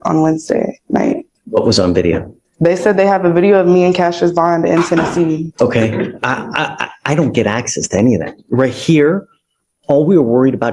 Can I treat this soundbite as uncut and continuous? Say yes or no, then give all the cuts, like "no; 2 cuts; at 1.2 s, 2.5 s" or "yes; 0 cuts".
no; 2 cuts; at 1.3 s, 5.5 s